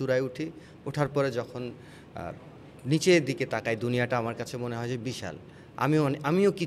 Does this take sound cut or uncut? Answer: uncut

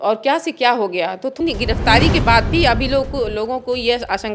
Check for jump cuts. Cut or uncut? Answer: cut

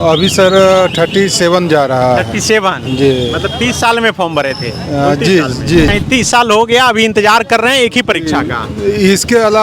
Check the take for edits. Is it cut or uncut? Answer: cut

